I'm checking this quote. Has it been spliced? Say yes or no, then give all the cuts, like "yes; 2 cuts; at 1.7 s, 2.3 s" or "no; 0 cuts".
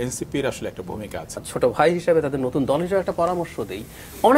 yes; 1 cut; at 1.4 s